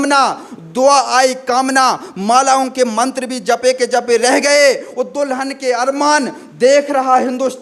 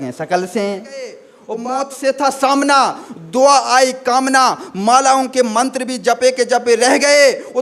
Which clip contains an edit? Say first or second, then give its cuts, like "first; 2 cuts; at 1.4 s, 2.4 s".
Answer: second; 1 cut; at 1.3 s